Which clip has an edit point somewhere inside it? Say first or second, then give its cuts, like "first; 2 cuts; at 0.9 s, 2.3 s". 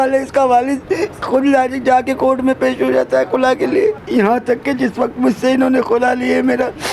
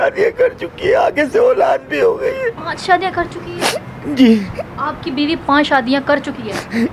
first; 2 cuts; at 1.2 s, 4.0 s